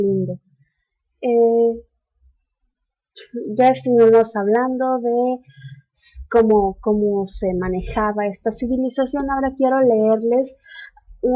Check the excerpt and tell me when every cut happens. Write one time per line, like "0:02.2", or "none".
none